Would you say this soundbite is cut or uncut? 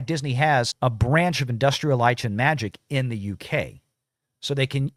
uncut